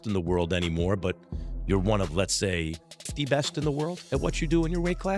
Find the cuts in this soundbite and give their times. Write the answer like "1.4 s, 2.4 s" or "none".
3.1 s

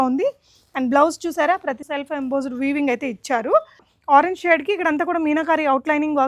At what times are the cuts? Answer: 1.8 s, 3.9 s

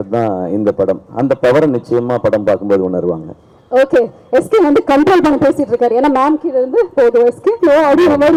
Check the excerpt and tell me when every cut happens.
none

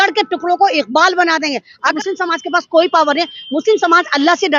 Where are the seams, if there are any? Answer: 1.9 s

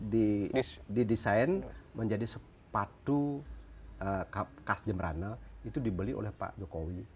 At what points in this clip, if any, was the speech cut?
none

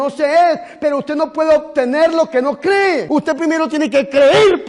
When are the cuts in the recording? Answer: 3.0 s

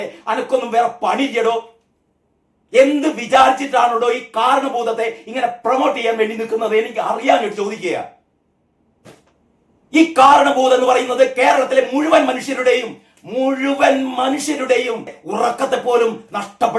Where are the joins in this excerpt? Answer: 15.2 s

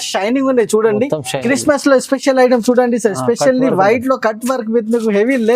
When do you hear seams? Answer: 1.4 s

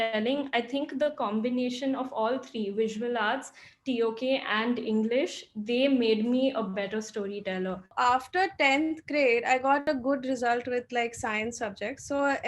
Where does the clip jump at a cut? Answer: 7.9 s, 9.8 s

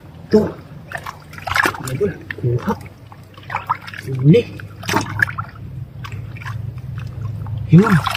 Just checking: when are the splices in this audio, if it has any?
none

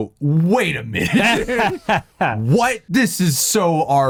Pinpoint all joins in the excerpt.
none

